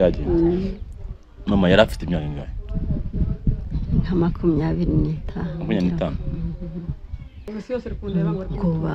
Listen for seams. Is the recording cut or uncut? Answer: cut